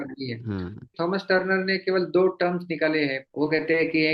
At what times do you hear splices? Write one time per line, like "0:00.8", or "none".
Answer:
0:00.9
0:03.2

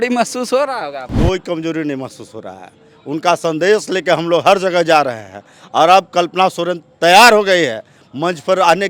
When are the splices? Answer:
0:01.0

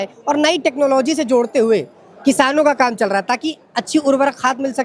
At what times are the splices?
none

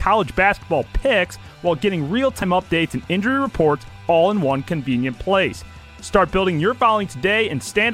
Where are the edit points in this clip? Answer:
0:02.4

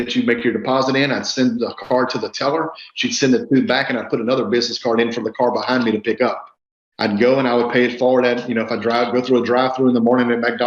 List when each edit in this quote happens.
none

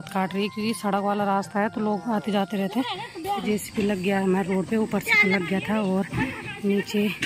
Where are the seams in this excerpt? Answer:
0:03.4

